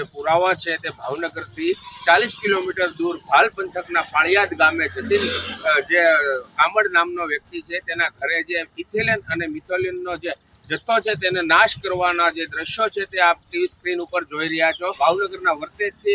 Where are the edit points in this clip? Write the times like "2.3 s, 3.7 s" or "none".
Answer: 15.0 s